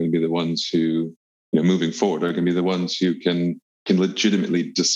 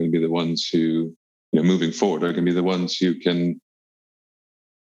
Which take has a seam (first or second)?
first